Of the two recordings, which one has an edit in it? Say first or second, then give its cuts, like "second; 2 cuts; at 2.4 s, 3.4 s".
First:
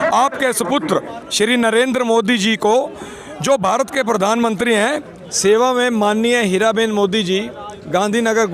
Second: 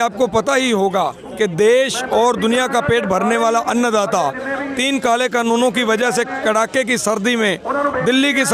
first; 1 cut; at 5.0 s